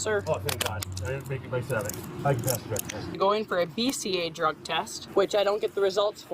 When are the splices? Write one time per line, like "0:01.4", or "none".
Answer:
0:02.0
0:03.1
0:05.0